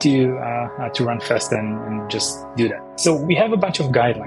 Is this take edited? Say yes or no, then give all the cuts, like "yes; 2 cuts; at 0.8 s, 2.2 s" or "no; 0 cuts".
yes; 1 cut; at 2.9 s